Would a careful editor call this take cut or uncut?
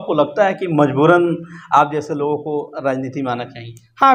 uncut